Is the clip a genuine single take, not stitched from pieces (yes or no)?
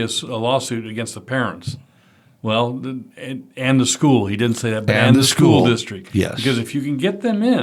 yes